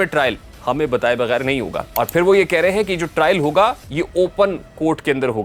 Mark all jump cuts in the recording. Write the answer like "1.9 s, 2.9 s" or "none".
1.8 s